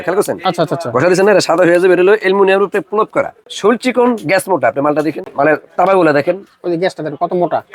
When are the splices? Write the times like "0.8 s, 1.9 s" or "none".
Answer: 3.4 s, 5.2 s

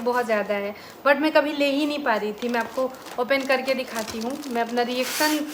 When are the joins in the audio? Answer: none

